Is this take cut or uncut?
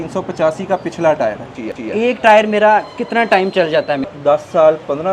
cut